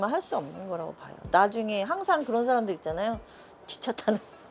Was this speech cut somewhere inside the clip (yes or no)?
no